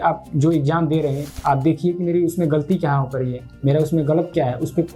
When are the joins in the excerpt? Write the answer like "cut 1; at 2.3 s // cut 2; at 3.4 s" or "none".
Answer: none